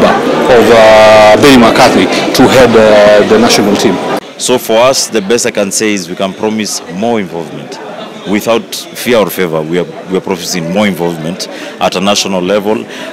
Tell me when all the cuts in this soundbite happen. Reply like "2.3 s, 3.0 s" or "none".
4.1 s

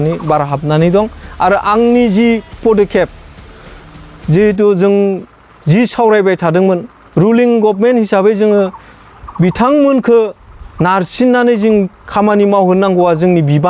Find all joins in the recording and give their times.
none

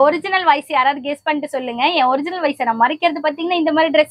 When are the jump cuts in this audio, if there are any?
none

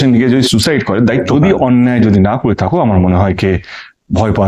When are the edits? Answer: 1.3 s

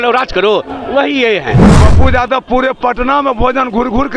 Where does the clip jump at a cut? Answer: 1.8 s

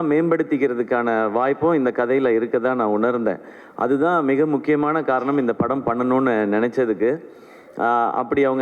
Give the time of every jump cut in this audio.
none

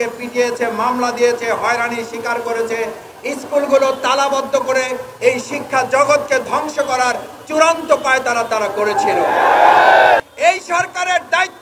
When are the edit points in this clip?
10.2 s

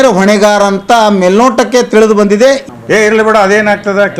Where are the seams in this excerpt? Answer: 2.6 s

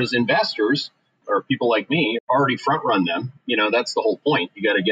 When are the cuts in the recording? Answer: 1.2 s, 2.2 s

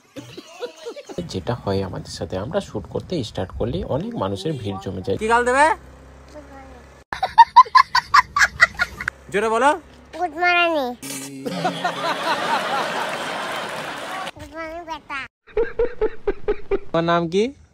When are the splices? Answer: 1.2 s, 5.2 s, 16.9 s

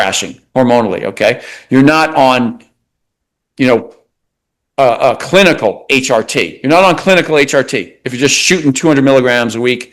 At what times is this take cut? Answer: none

